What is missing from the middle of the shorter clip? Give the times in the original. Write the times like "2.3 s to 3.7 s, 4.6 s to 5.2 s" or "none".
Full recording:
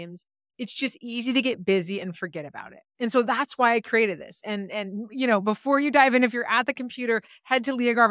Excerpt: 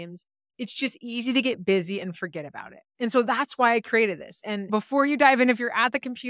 4.7 s to 5.4 s